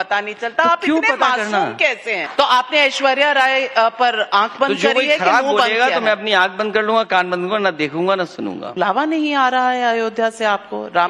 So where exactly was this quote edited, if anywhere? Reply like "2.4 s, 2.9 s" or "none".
2.2 s, 8.6 s